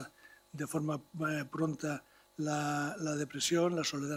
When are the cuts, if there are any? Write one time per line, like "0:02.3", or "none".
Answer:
none